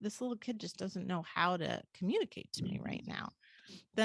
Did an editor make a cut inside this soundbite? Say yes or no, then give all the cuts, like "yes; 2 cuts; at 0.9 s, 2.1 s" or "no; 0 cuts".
no; 0 cuts